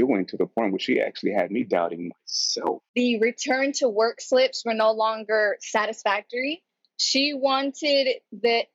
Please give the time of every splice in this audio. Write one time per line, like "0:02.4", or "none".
0:02.8